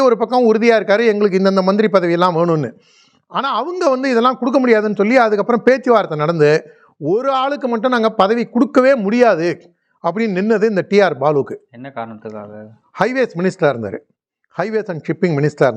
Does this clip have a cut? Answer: no; 0 cuts

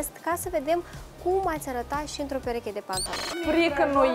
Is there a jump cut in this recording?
yes; 1 cut; at 3.2 s

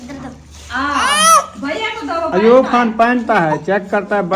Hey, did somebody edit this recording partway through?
no; 0 cuts

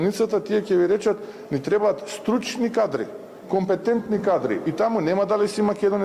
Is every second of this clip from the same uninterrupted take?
yes; 0 cuts

